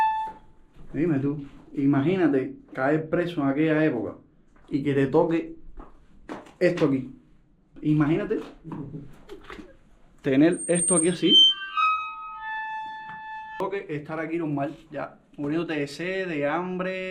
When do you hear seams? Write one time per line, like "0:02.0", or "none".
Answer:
0:07.7
0:13.6